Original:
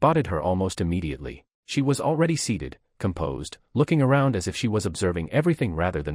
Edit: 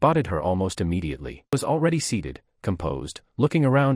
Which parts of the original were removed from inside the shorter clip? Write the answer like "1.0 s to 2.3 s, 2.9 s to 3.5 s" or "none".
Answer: 1.5 s to 1.9 s